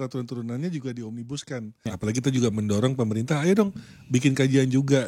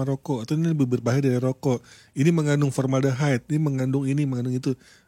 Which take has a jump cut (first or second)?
first